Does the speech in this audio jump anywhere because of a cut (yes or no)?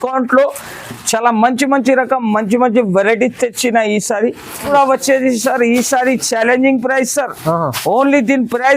yes